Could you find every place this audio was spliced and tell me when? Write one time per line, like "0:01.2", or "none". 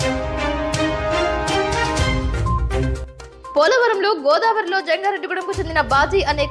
none